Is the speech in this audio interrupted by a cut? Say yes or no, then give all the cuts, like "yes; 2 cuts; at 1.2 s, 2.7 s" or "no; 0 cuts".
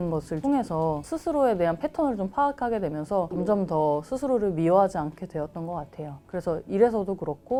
no; 0 cuts